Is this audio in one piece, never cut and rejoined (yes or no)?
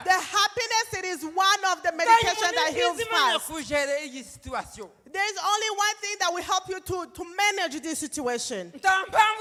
yes